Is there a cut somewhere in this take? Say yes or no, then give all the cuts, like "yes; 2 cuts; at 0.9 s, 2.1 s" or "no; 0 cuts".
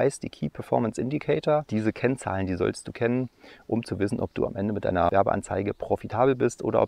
yes; 2 cuts; at 1.7 s, 5.1 s